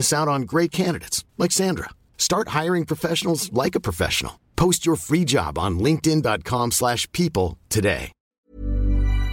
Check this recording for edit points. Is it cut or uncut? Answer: cut